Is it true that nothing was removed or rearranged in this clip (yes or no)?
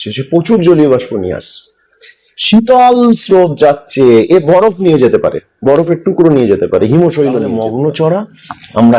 no